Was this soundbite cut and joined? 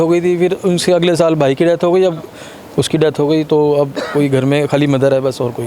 no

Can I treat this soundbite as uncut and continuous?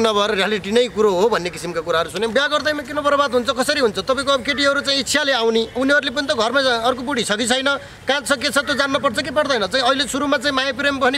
no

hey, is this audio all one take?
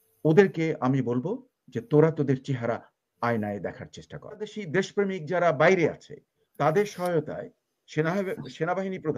no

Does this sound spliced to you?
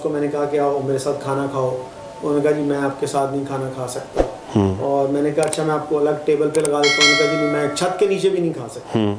no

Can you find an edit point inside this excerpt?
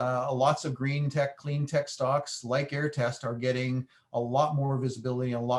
no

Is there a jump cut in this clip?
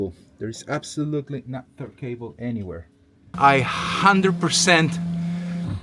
yes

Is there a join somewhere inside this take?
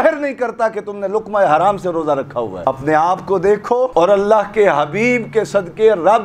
yes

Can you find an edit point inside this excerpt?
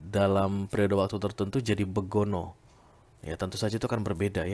no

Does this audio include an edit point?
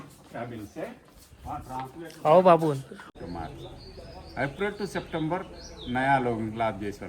yes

